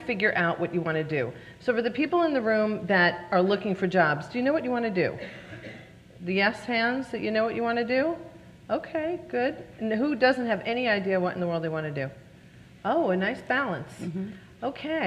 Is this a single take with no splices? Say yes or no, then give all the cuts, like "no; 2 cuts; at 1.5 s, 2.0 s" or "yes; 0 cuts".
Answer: no; 1 cut; at 11.0 s